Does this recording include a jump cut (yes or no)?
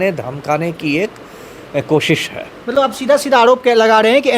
no